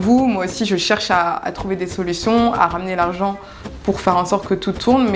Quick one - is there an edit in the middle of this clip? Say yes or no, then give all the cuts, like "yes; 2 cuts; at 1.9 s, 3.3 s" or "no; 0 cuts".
no; 0 cuts